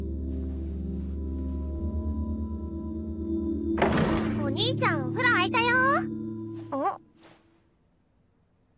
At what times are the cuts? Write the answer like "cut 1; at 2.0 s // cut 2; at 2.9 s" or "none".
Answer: cut 1; at 3.3 s